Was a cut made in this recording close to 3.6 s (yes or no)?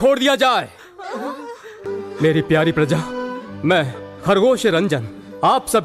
no